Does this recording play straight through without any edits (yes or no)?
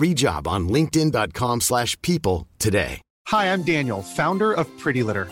no